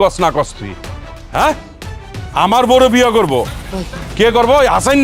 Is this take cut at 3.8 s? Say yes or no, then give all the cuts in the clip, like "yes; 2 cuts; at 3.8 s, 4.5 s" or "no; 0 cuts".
yes; 1 cut; at 3.8 s